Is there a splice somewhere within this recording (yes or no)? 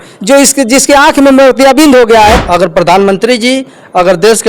yes